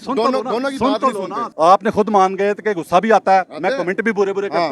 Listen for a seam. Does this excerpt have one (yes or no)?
yes